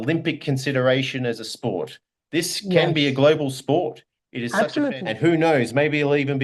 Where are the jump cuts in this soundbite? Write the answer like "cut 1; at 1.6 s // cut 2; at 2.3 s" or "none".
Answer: cut 1; at 4.9 s